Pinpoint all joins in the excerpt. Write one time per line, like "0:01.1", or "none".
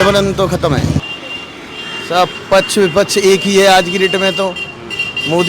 0:01.0